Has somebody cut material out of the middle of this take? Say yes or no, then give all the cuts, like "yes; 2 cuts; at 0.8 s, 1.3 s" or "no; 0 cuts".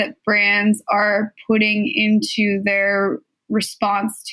no; 0 cuts